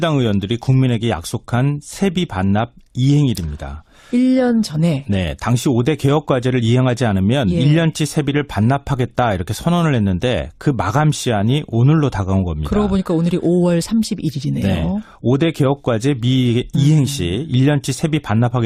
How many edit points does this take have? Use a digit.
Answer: 0